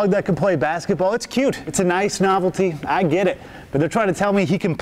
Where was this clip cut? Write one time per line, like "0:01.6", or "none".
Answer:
none